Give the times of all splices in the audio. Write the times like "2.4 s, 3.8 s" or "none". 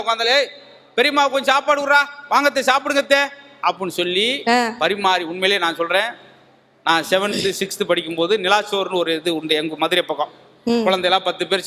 none